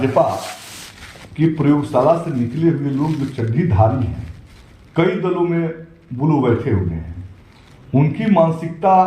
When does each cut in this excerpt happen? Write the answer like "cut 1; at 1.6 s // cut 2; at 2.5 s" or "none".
none